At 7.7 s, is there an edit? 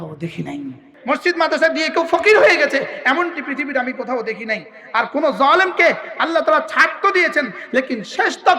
no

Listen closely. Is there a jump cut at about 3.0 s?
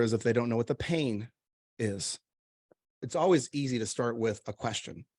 yes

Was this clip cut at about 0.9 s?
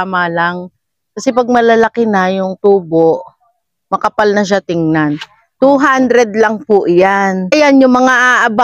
no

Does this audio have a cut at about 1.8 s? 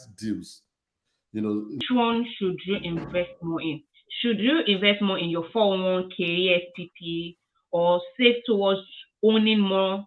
yes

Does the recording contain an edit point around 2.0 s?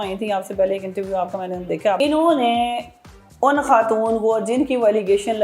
yes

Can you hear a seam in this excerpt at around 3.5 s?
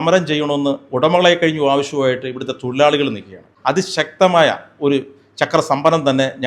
yes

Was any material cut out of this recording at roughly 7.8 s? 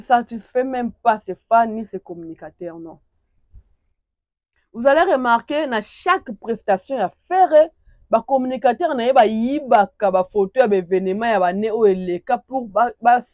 no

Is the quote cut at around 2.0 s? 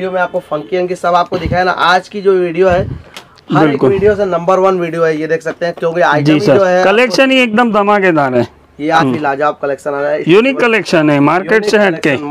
no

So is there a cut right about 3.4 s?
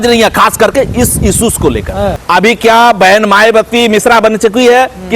no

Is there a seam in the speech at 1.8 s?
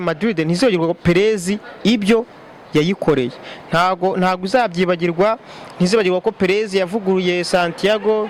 no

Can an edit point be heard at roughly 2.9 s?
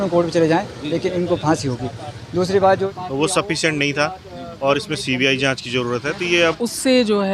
yes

